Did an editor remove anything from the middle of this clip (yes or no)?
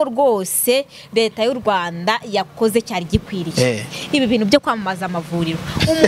no